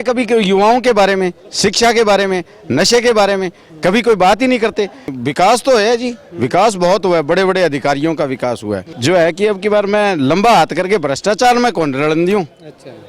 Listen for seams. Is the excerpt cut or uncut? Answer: cut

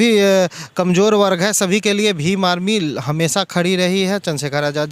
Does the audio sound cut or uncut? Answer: uncut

